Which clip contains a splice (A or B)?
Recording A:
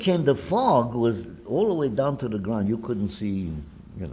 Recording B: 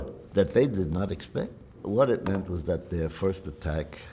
B